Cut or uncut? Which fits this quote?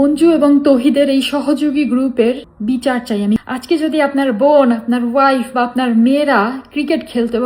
cut